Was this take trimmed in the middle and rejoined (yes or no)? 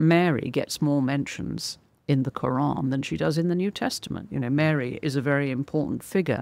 no